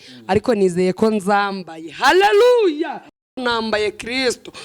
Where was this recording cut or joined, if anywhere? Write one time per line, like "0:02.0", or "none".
0:03.4